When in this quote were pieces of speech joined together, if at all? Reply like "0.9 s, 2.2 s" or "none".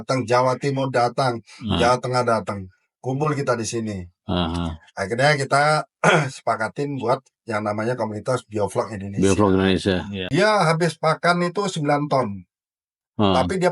10.1 s